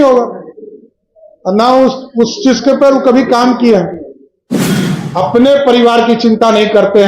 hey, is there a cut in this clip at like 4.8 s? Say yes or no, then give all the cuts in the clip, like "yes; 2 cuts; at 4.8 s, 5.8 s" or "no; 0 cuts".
yes; 1 cut; at 4.8 s